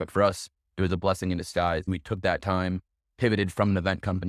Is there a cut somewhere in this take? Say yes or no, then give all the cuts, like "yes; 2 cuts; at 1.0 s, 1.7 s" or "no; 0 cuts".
yes; 1 cut; at 1.9 s